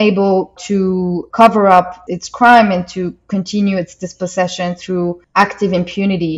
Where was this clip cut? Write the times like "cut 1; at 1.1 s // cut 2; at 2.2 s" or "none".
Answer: none

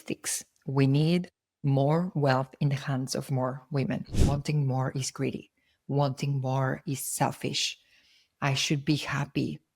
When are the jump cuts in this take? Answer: cut 1; at 4.1 s

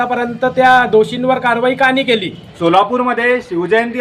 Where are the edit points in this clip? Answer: cut 1; at 2.4 s

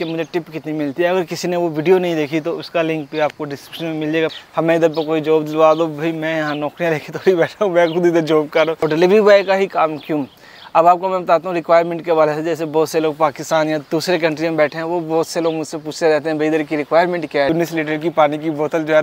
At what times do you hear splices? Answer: cut 1; at 4.3 s // cut 2; at 8.8 s // cut 3; at 17.5 s

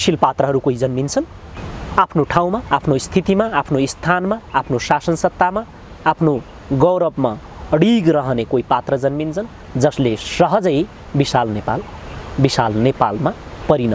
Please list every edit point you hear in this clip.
none

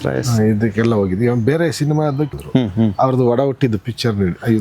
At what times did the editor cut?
cut 1; at 2.3 s

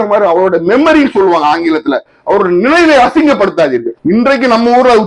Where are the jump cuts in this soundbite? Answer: cut 1; at 3.9 s

